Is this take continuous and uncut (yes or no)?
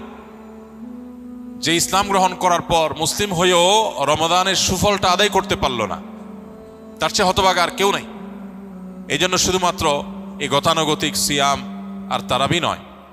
yes